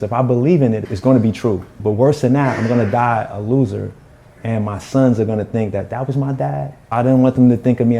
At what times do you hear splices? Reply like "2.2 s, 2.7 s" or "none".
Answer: 0.9 s, 1.8 s, 6.9 s